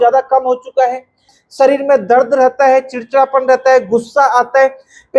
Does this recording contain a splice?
yes; 1 cut; at 1.3 s

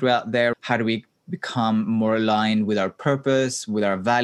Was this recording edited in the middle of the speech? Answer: no; 0 cuts

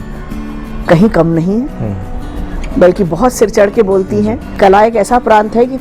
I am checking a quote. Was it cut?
yes; 1 cut; at 4.6 s

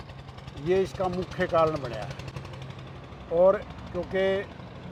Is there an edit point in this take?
no; 0 cuts

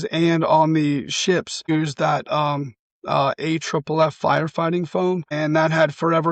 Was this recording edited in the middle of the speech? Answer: yes; 2 cuts; at 1.7 s, 5.3 s

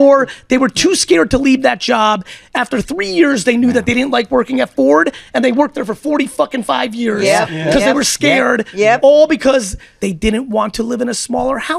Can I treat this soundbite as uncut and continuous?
no; 1 cut; at 9.8 s

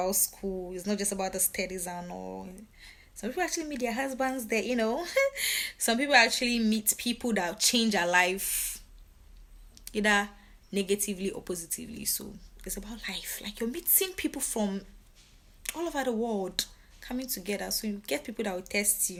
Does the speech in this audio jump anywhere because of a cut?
no; 0 cuts

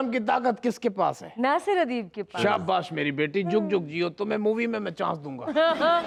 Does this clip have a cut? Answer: no; 0 cuts

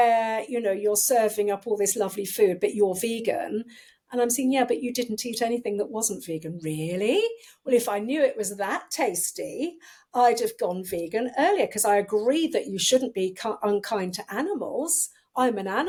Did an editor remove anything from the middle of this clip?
no; 0 cuts

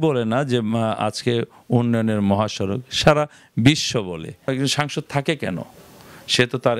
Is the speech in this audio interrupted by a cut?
yes; 1 cut; at 4.5 s

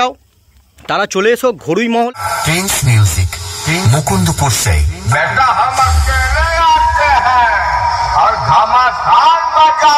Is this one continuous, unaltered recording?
no; 1 cut; at 2.1 s

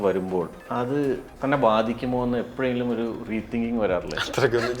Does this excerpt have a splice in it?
yes; 1 cut; at 1.0 s

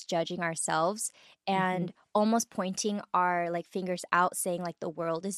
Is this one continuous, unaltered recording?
yes; 0 cuts

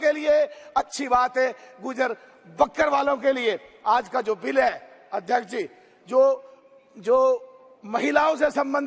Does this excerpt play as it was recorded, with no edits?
yes; 0 cuts

